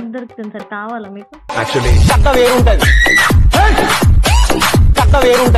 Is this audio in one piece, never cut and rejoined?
yes; 0 cuts

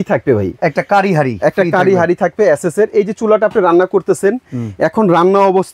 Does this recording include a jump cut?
no; 0 cuts

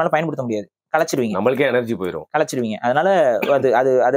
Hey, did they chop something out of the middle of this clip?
no; 0 cuts

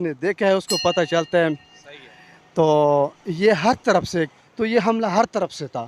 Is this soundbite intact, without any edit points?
no; 1 cut; at 4.4 s

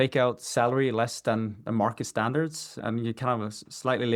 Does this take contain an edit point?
no; 0 cuts

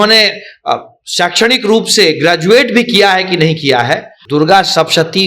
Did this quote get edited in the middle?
yes; 1 cut; at 4.1 s

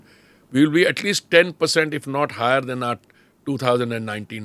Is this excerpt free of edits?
yes; 0 cuts

